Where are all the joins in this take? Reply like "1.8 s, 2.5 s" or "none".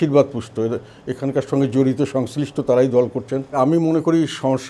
3.6 s